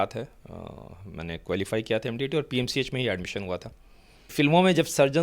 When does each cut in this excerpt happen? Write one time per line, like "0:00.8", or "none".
0:04.3